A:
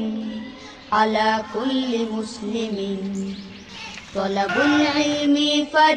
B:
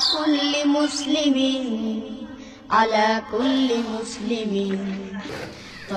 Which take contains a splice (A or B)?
B